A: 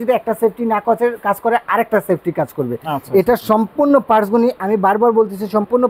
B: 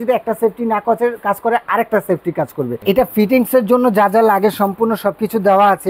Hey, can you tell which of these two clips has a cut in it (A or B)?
B